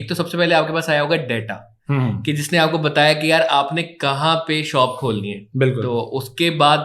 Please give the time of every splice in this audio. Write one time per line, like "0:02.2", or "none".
none